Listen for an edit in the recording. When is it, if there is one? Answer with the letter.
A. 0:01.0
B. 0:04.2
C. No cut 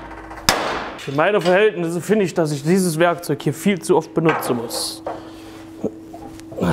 A